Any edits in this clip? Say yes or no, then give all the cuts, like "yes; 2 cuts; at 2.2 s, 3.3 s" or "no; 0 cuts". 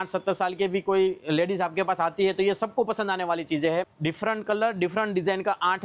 yes; 1 cut; at 3.9 s